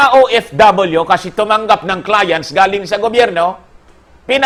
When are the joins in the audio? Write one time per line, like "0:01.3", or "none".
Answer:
none

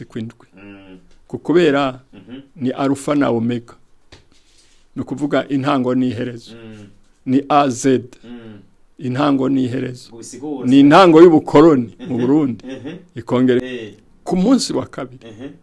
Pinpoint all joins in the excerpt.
0:13.6

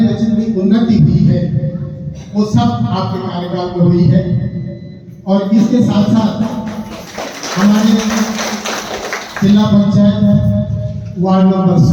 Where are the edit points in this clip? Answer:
none

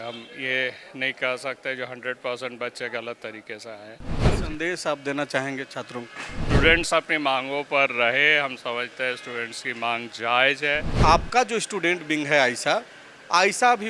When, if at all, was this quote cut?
0:04.2
0:06.3
0:10.9

